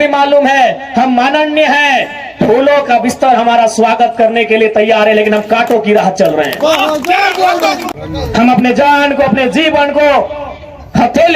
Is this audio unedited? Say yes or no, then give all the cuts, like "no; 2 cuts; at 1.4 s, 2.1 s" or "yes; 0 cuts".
no; 1 cut; at 7.9 s